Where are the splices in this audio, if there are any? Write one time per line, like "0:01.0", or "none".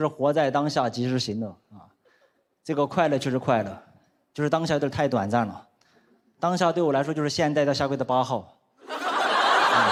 none